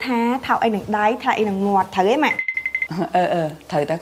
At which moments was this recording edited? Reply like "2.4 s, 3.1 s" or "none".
none